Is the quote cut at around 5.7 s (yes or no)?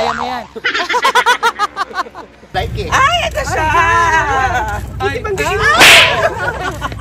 no